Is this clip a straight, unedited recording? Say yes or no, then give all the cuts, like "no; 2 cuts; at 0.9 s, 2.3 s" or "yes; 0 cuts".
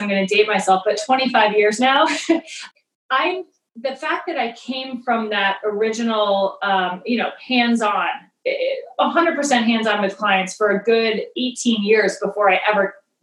no; 1 cut; at 2.6 s